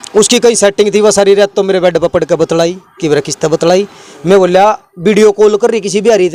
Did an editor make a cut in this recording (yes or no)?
no